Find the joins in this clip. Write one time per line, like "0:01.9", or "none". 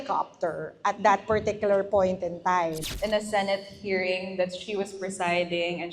0:02.9